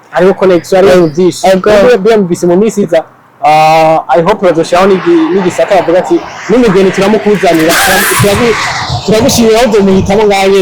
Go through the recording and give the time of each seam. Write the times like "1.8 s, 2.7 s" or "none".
none